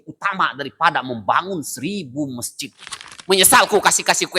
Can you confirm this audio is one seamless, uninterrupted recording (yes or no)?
no